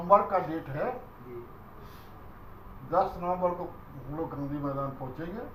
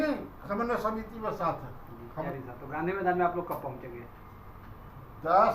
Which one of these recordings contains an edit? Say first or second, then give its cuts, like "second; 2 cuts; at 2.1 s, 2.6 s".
second; 1 cut; at 2.3 s